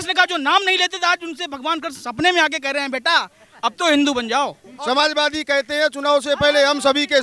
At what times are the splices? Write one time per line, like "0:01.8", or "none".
0:04.7